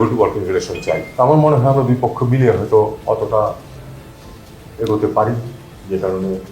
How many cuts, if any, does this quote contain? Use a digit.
1